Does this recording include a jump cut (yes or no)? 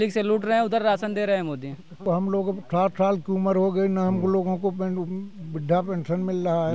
yes